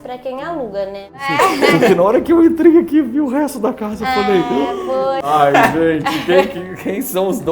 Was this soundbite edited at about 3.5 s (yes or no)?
no